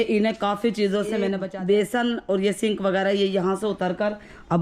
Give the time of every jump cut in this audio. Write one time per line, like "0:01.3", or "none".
0:01.4